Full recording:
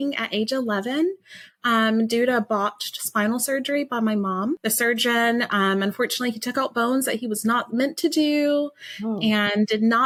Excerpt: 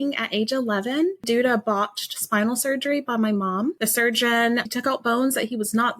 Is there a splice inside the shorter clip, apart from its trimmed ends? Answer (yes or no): yes